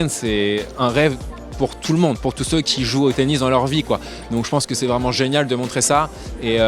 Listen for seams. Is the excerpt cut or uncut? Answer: uncut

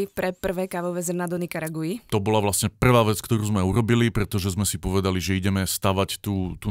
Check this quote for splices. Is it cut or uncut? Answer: uncut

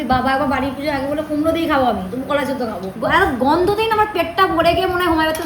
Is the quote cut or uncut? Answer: cut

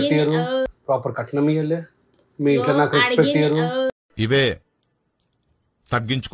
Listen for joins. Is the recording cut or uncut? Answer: uncut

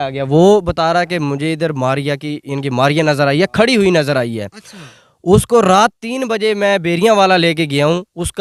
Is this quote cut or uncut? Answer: uncut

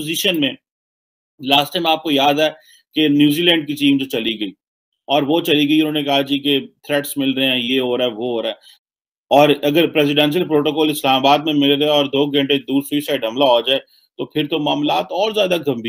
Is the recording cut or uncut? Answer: cut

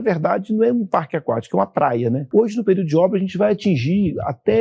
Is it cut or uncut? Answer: cut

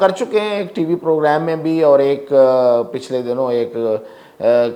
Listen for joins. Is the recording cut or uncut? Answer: uncut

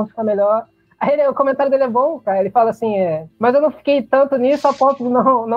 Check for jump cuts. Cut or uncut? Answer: cut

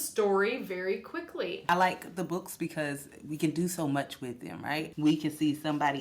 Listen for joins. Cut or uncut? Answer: cut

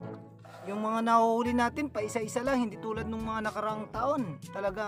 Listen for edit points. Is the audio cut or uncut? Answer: uncut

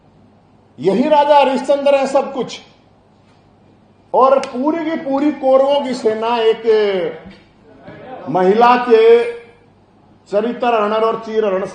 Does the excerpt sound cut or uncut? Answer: uncut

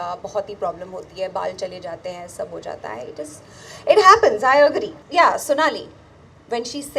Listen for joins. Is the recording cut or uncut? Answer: cut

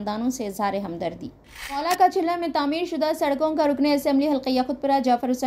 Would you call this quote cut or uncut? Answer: cut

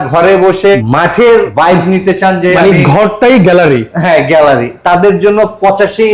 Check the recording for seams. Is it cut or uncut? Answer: cut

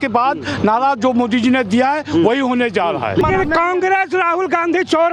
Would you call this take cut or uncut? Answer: cut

